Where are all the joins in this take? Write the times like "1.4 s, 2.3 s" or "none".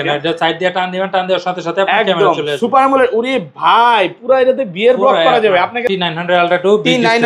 5.9 s